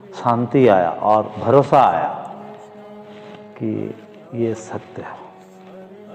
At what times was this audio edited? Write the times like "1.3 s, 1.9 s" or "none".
none